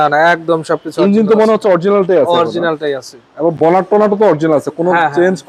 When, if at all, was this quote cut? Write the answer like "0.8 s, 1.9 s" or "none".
none